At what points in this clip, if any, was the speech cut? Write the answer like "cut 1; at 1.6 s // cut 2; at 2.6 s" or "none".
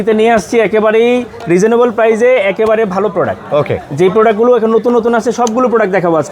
none